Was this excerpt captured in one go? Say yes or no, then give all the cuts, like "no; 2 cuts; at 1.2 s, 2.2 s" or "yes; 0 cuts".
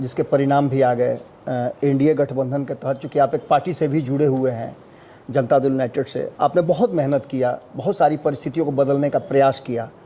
yes; 0 cuts